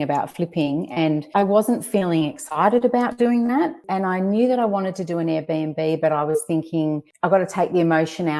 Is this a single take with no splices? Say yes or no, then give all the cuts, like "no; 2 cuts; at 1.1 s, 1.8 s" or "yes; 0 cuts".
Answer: no; 2 cuts; at 1.3 s, 3.8 s